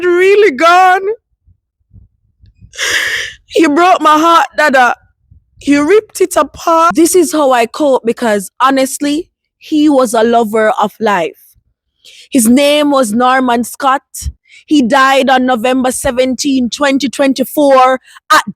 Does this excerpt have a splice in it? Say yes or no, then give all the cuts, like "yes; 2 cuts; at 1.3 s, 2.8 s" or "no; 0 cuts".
yes; 1 cut; at 6.9 s